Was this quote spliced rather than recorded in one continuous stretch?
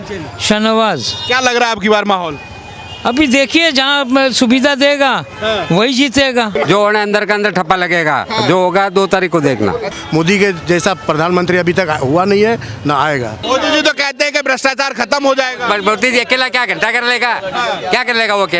yes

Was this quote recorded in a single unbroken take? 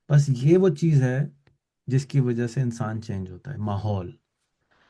yes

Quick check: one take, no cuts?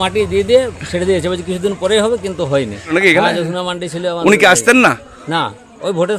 no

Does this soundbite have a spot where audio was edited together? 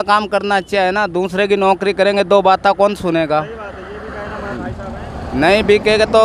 yes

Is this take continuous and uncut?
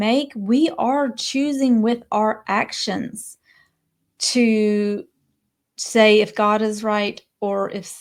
yes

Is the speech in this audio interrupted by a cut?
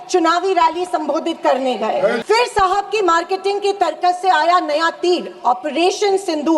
yes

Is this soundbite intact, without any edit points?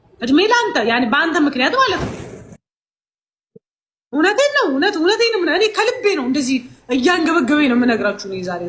yes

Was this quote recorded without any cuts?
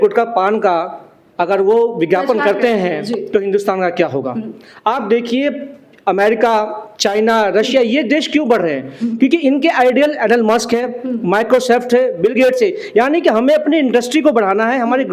yes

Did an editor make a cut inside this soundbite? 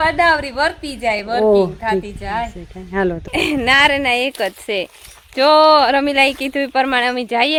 no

